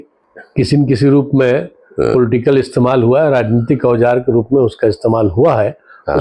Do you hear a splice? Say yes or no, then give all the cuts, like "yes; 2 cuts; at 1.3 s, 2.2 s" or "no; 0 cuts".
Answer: no; 0 cuts